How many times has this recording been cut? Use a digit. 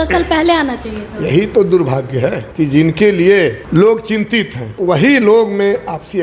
3